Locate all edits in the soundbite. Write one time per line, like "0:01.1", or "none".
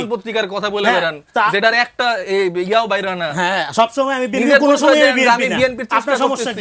none